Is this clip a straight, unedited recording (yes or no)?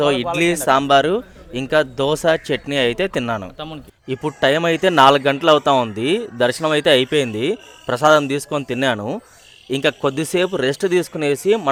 yes